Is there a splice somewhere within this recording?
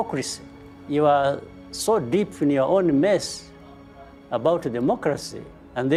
no; 0 cuts

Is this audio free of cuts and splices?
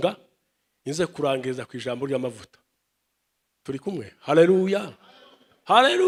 yes; 0 cuts

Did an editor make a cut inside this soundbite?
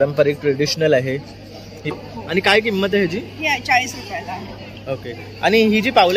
yes; 1 cut; at 1.9 s

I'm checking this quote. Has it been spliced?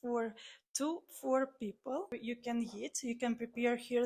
yes; 1 cut; at 2.2 s

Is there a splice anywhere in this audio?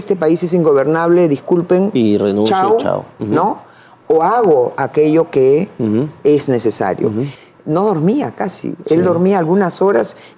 yes; 1 cut; at 7.3 s

